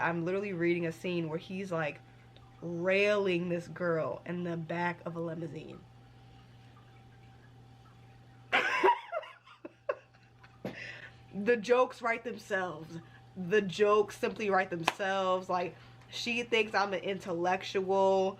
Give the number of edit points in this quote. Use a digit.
0